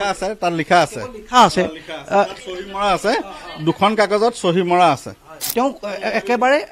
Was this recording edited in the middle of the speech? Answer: yes; 1 cut; at 5.4 s

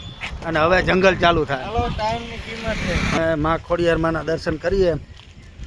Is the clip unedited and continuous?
no; 1 cut; at 3.2 s

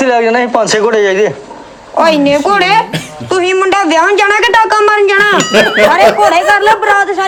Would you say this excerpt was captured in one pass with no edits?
yes; 0 cuts

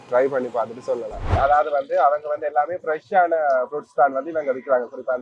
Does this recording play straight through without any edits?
no; 1 cut; at 1.3 s

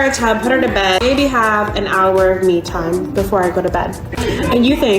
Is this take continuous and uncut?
no; 2 cuts; at 1.0 s, 4.0 s

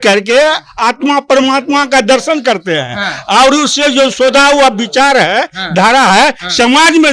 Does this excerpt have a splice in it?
no; 0 cuts

